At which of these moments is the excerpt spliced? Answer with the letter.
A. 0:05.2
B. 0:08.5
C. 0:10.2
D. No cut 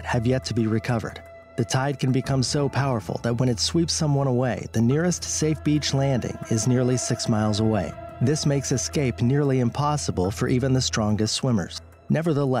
C